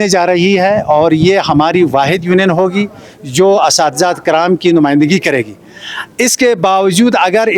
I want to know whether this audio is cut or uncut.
uncut